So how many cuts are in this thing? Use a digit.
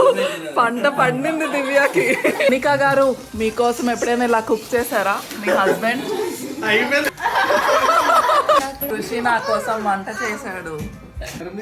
3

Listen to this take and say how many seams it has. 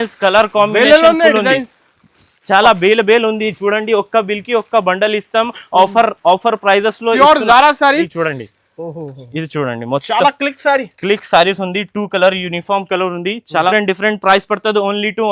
2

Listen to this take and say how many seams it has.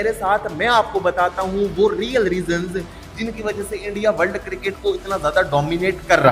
0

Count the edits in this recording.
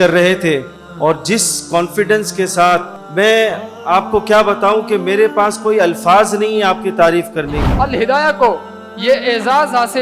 1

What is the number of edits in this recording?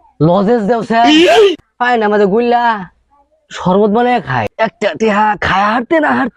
1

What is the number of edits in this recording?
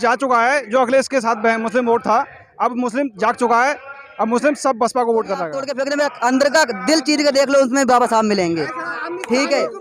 1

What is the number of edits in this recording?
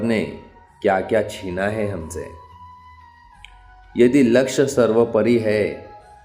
2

